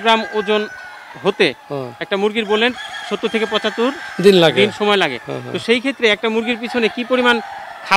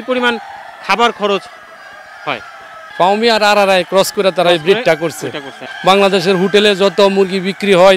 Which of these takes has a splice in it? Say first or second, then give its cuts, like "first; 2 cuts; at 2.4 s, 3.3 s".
second; 2 cuts; at 2.8 s, 5.6 s